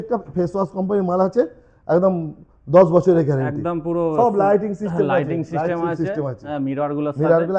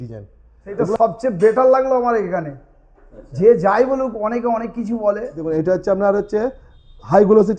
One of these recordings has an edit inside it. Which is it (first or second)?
second